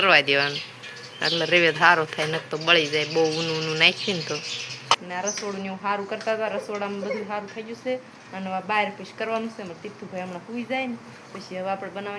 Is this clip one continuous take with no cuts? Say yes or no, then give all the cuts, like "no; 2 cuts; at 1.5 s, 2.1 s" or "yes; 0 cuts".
no; 1 cut; at 5.0 s